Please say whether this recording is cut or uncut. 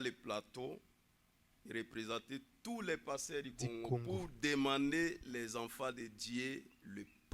uncut